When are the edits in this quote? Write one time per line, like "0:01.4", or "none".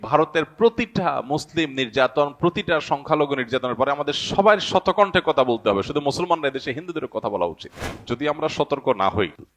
0:07.9